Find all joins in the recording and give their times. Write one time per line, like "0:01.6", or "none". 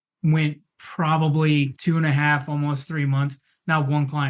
0:01.8